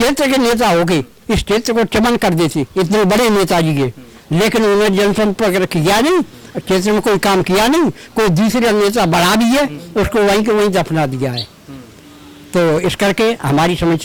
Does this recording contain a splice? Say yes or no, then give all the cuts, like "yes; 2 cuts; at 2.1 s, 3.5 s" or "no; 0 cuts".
no; 0 cuts